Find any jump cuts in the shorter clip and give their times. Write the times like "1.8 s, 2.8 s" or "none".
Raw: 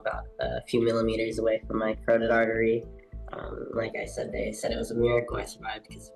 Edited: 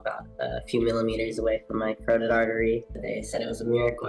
2.9 s

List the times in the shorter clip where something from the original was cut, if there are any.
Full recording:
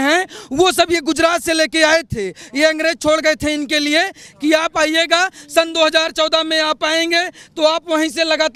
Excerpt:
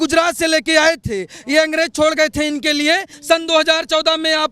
3.1 s

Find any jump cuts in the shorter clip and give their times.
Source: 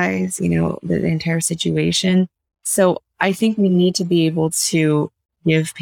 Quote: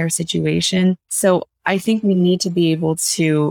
1.1 s

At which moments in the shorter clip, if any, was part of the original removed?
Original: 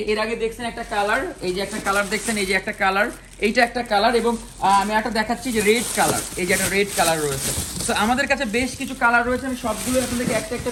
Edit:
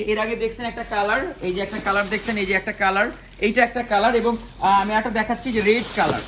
none

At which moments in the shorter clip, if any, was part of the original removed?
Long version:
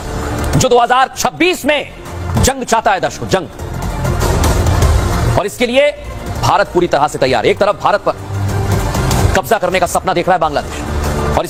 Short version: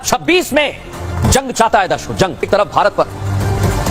2.5 s

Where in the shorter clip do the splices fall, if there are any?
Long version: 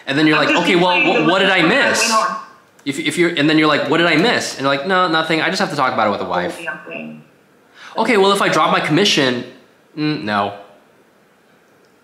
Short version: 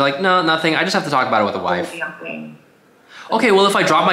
none

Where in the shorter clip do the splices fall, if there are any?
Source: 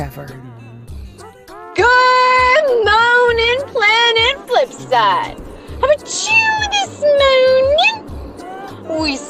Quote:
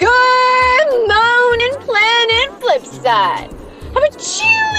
1.6 s

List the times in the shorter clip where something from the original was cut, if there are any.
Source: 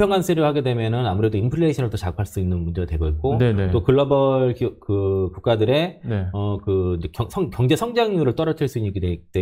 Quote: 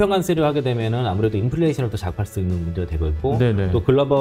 none

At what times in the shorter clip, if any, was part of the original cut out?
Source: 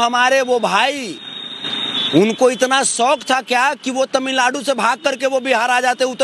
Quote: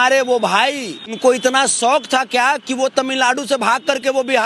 1.2 s

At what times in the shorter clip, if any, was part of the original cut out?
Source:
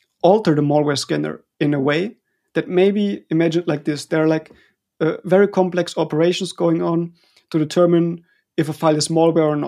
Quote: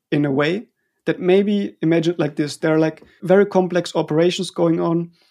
3.2 s

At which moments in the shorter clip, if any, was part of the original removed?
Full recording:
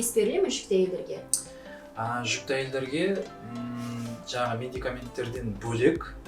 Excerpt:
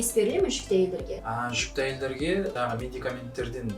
1.2 s, 2.5 s

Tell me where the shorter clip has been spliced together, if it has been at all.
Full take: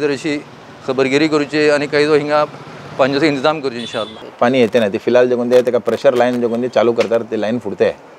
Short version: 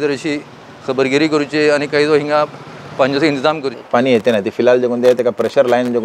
3.7 s

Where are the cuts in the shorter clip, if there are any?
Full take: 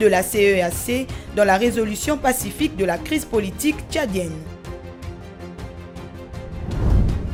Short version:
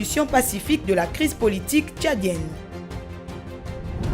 2.5 s

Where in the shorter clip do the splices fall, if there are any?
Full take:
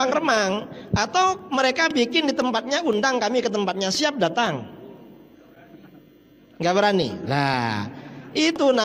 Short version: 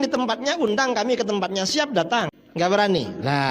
2.4 s

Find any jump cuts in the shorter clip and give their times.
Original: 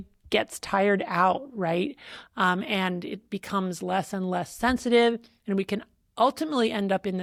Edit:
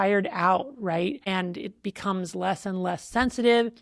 1.2 s

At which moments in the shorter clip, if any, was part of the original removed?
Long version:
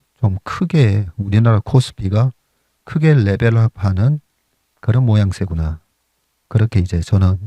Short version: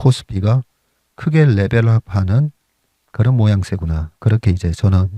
4.1 s

